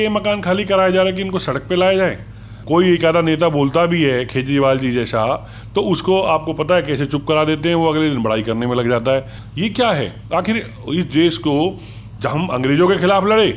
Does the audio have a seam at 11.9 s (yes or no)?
no